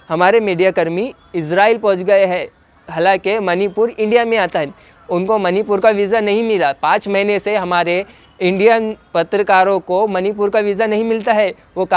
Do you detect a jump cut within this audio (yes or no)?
no